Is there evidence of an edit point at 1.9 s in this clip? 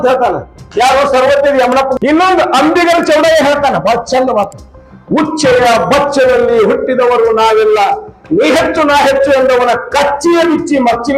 yes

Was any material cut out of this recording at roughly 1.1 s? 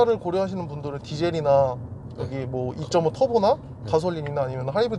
no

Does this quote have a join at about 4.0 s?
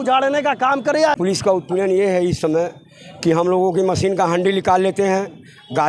no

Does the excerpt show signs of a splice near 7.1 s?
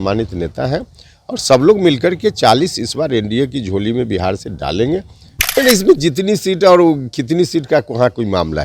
no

